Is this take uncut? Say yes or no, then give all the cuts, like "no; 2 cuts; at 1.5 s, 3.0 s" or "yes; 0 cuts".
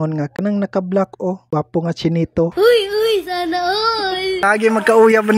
no; 1 cut; at 4.4 s